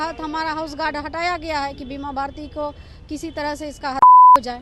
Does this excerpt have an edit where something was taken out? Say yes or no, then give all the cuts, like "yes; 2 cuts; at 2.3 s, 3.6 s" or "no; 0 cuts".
no; 0 cuts